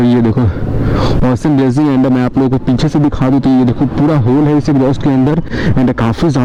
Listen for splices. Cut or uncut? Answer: uncut